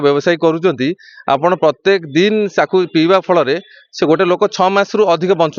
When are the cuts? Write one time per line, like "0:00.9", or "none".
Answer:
none